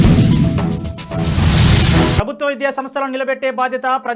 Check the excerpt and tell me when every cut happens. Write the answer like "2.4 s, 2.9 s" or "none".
2.2 s